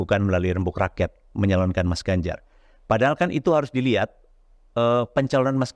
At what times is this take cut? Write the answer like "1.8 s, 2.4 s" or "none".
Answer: none